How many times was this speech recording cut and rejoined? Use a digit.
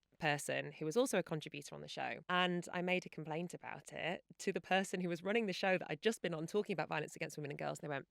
1